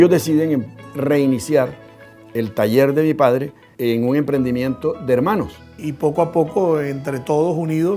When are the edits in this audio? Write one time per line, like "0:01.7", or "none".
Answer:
0:00.9
0:03.6
0:05.8